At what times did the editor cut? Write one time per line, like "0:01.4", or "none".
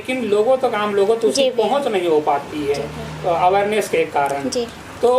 none